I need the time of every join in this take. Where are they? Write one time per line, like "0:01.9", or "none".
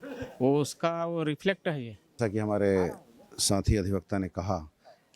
0:02.2